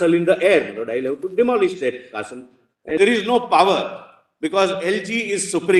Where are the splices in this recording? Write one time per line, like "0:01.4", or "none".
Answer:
0:03.0